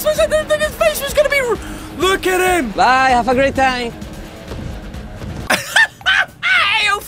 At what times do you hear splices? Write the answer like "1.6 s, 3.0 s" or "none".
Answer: 2.7 s, 5.5 s